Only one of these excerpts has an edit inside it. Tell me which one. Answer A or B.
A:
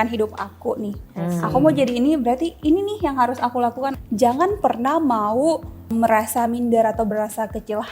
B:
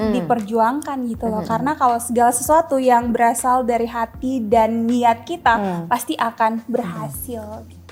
A